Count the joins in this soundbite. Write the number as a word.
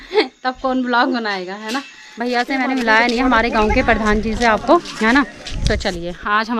one